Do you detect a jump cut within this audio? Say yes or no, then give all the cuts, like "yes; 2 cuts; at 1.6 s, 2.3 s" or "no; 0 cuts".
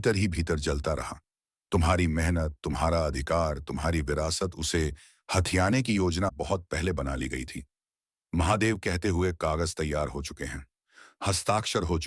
yes; 1 cut; at 6.3 s